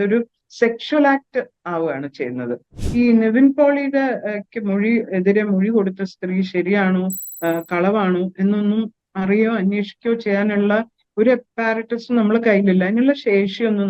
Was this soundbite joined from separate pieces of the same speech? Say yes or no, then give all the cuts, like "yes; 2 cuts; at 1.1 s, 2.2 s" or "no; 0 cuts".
yes; 1 cut; at 2.7 s